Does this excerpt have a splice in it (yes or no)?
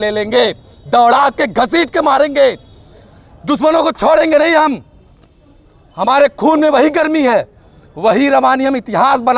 no